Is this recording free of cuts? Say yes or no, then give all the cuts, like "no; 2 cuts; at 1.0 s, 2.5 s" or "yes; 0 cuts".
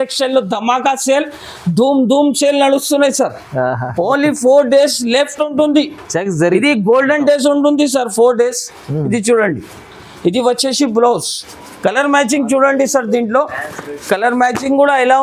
yes; 0 cuts